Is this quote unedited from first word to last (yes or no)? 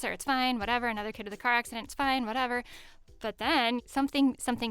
no